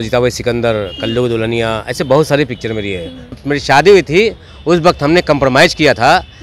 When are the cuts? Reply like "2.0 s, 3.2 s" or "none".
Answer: 3.4 s